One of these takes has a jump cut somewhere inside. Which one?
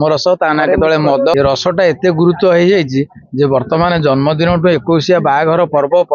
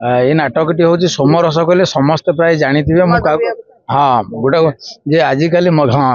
first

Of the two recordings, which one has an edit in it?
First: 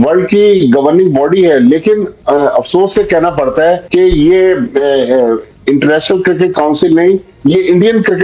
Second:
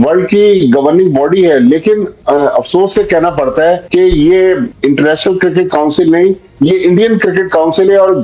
second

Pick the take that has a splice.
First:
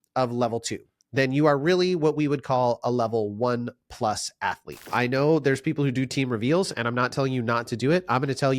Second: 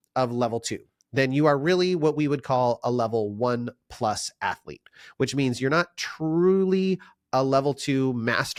first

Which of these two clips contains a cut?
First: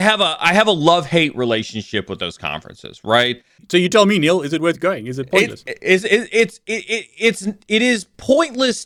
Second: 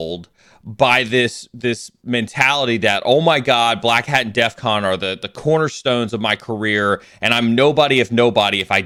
first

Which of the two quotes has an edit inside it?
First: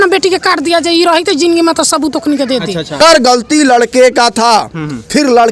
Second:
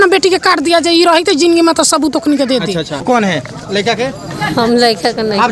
first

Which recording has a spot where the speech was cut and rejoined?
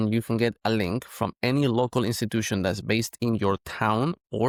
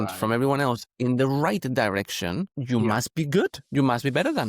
second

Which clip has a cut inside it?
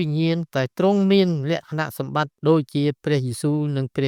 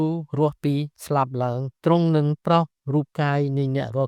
second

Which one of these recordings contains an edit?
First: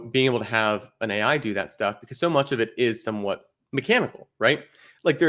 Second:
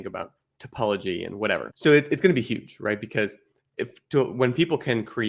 second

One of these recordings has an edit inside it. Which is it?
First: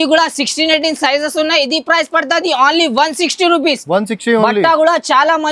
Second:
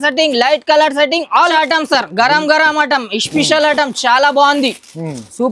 second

